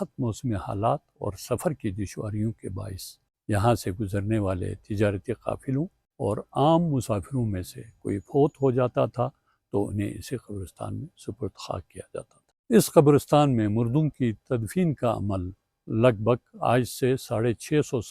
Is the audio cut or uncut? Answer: cut